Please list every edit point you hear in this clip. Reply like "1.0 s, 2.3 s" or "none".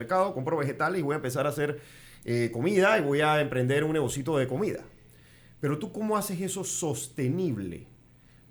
none